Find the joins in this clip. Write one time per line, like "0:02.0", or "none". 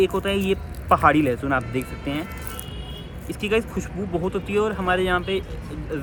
none